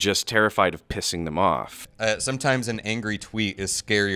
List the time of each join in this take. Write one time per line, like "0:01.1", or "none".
0:01.8

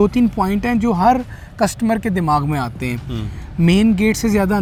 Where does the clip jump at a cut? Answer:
none

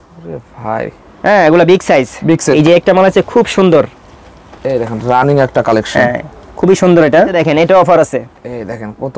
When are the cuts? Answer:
0:02.5
0:07.3

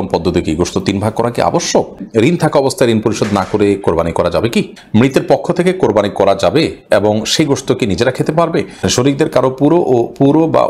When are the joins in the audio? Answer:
0:02.0
0:04.8
0:08.8

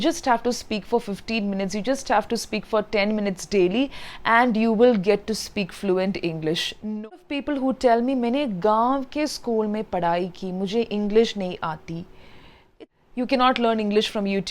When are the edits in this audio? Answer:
0:07.2
0:12.6

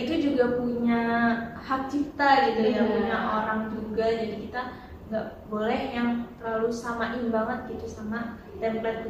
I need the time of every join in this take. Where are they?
none

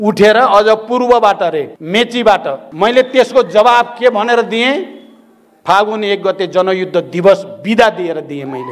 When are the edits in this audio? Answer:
0:01.8
0:02.7

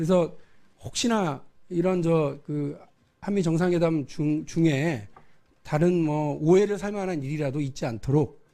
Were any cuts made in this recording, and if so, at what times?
0:03.8

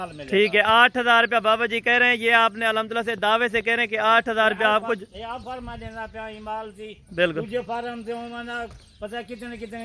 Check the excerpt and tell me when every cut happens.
none

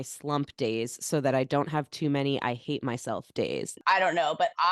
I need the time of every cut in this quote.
0:03.8

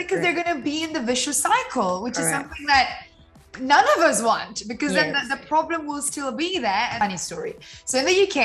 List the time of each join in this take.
0:07.0

